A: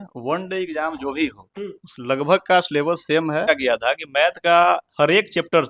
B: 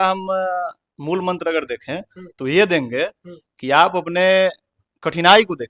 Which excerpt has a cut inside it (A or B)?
A